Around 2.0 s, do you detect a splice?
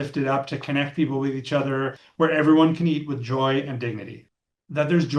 yes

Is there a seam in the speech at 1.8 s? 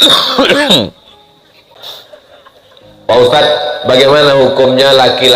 yes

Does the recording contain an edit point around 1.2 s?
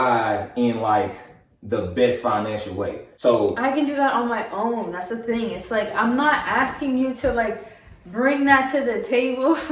no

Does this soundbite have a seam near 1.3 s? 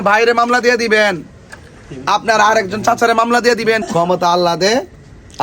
no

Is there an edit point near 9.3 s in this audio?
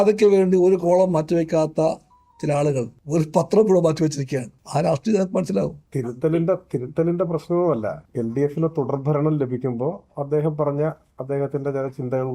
no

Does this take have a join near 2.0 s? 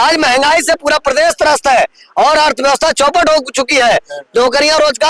no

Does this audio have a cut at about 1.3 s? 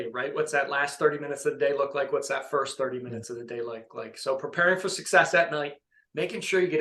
no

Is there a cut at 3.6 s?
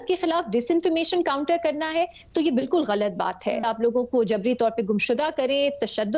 yes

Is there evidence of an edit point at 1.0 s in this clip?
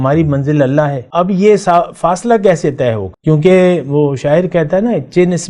yes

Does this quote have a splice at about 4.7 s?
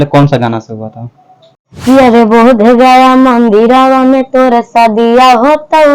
no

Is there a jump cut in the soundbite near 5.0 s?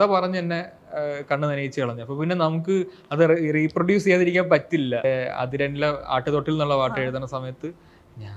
yes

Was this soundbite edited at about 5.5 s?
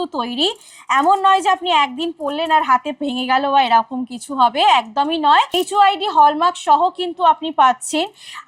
yes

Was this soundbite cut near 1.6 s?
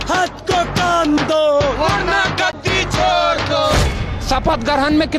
no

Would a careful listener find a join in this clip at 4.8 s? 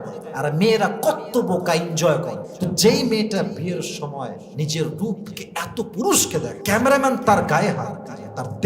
no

